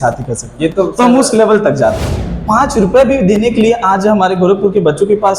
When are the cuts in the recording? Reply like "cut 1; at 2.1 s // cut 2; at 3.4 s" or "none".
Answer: cut 1; at 2.1 s